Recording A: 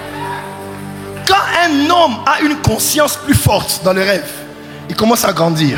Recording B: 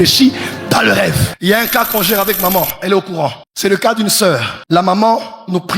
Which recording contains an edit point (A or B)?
B